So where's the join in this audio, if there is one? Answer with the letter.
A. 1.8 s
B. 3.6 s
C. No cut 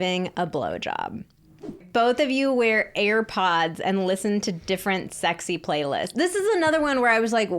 A